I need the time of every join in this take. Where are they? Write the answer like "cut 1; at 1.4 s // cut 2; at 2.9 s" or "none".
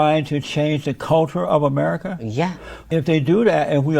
cut 1; at 2.8 s